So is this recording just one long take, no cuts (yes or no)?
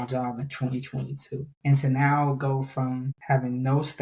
no